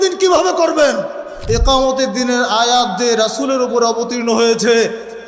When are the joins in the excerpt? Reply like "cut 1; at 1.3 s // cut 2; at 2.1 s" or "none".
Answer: cut 1; at 1.3 s